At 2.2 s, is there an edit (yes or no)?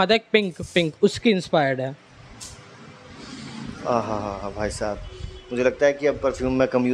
no